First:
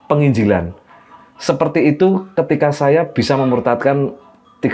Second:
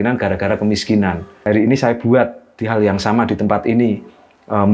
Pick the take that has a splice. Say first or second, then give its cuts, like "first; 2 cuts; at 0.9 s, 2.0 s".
second; 1 cut; at 1.3 s